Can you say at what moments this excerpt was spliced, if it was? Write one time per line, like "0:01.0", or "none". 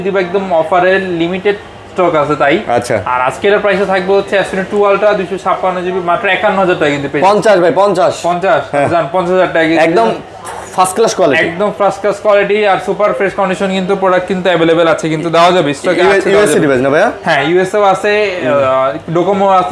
none